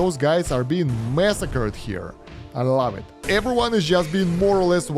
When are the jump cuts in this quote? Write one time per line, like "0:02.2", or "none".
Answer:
0:03.1